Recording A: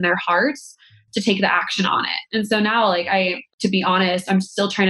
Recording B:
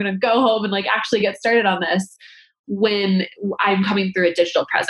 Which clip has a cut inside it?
A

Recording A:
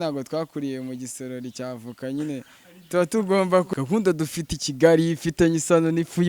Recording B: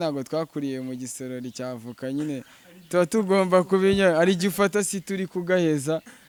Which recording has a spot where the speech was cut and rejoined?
A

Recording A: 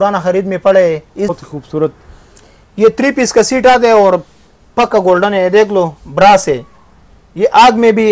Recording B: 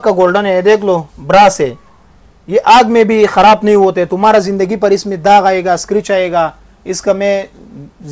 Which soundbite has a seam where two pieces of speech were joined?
A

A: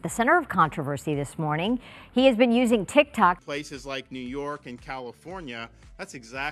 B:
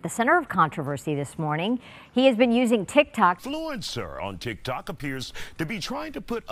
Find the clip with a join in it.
A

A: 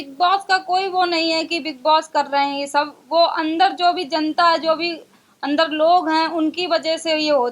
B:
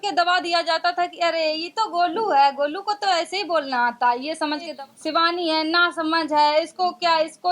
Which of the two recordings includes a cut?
B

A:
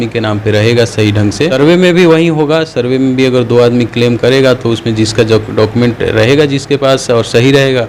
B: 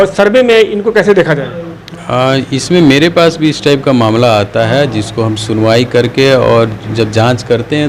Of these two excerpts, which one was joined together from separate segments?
A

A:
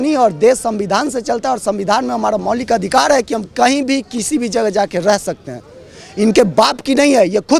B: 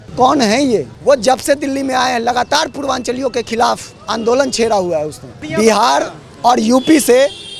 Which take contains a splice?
B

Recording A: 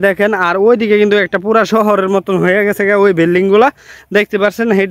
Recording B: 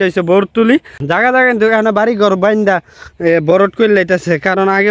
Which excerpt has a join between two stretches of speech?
B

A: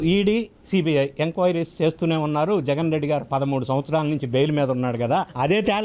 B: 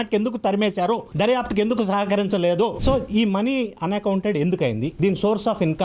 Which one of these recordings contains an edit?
B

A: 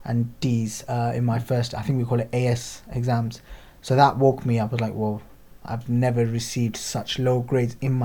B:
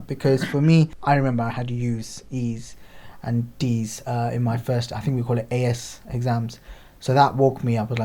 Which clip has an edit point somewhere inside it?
B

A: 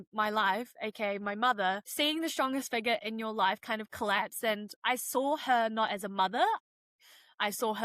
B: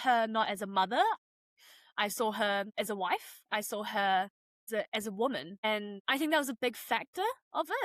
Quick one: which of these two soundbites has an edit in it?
A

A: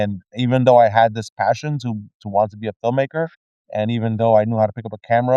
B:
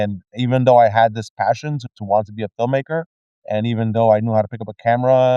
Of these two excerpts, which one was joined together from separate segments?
B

